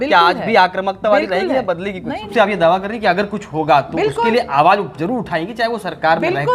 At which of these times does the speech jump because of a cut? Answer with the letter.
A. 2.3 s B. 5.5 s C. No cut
A